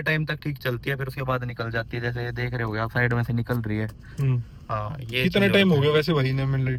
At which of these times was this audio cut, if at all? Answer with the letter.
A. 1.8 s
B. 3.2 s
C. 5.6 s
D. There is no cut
D